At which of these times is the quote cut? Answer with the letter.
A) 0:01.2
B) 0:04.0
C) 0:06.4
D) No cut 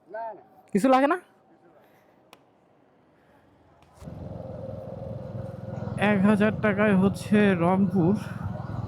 B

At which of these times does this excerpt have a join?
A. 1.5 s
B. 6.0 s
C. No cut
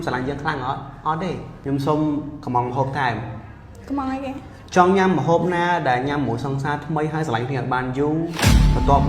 A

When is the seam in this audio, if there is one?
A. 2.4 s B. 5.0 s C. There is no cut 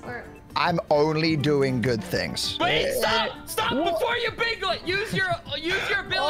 A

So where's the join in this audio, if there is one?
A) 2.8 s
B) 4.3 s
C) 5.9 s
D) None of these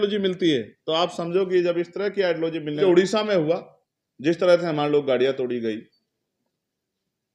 A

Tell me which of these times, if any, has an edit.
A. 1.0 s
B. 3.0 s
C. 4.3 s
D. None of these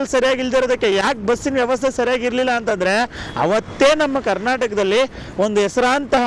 D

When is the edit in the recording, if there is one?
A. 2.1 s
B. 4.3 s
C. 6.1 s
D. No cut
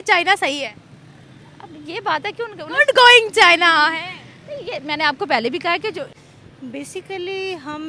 C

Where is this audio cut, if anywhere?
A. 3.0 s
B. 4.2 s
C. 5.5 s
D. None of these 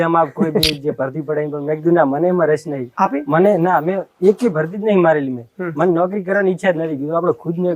D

